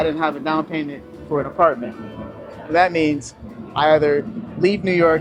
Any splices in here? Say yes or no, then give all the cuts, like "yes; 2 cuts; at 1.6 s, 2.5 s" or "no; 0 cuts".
no; 0 cuts